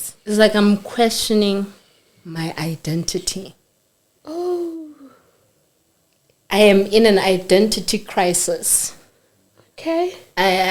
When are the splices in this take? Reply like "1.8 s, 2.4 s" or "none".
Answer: none